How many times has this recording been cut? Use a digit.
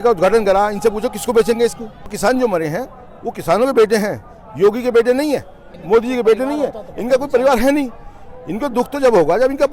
2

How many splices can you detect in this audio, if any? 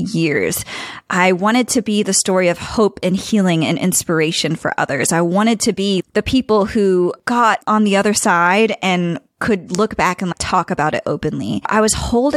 1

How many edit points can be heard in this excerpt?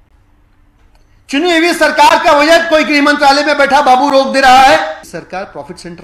1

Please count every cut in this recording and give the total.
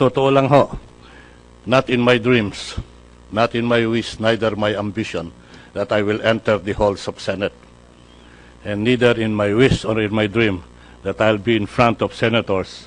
0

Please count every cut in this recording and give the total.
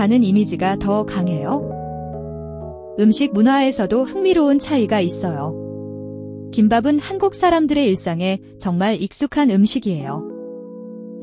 2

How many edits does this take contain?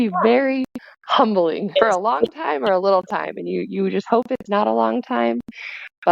1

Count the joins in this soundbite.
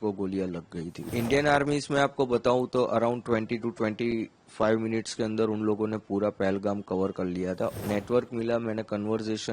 2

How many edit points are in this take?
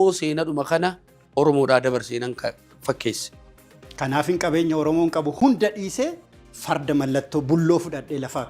0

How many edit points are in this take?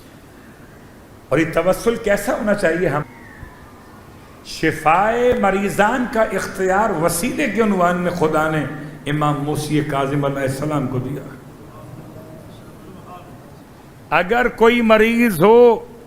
1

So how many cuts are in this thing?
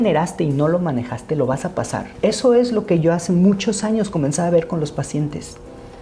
1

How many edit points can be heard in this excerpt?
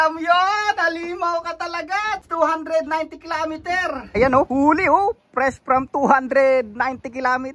2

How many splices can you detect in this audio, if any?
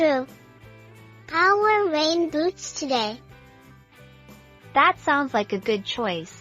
2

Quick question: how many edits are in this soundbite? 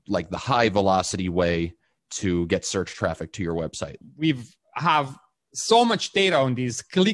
1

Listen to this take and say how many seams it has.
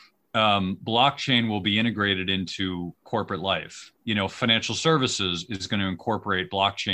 1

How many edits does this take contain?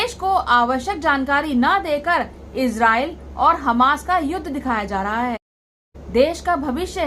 1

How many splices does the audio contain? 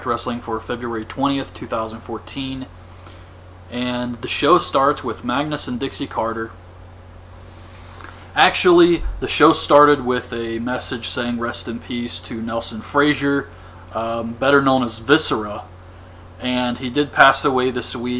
1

